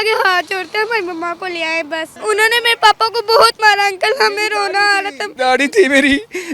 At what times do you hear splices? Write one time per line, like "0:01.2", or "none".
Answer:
0:02.1